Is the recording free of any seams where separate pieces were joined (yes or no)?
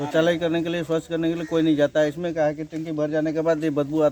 yes